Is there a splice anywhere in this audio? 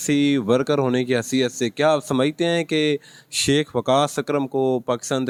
no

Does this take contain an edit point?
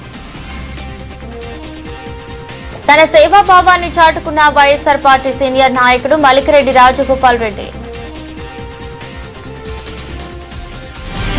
no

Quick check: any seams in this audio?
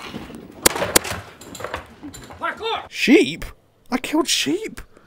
yes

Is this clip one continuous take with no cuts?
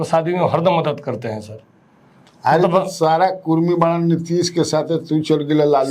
yes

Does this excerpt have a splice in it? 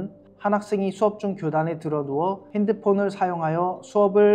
yes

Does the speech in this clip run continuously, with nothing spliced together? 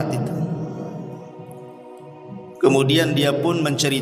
yes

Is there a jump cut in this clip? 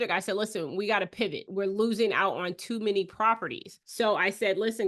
yes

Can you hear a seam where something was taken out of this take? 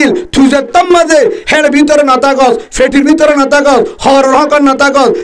no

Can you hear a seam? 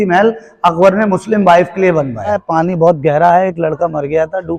yes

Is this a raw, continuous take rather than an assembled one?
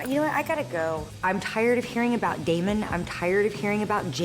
no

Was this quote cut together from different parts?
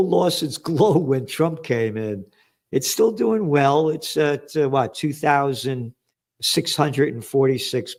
no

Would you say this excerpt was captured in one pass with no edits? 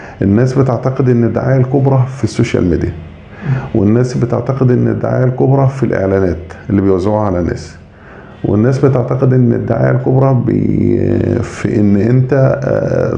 yes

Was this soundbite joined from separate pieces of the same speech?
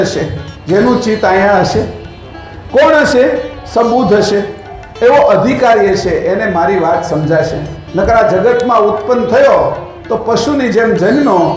no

